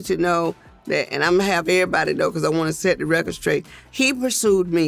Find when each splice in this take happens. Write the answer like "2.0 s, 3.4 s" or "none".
3.8 s